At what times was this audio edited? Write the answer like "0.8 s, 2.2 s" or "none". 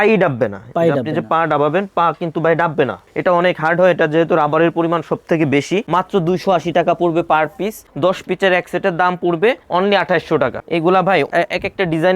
5.9 s, 10.6 s